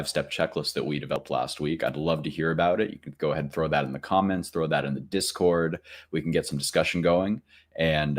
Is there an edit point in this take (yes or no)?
yes